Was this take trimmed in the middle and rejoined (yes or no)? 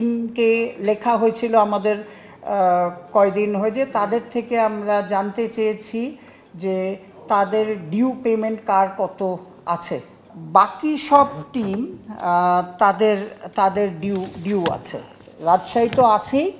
yes